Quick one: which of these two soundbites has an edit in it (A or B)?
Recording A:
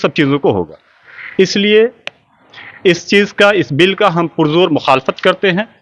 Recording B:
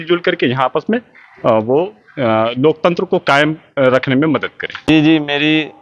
B